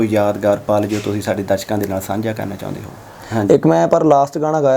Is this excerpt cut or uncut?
cut